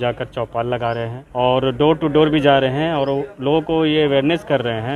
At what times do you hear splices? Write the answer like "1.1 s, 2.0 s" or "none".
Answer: 1.2 s